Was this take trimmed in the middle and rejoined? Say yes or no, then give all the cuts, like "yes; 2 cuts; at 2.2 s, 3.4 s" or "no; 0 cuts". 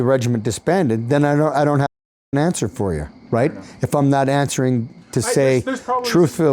no; 0 cuts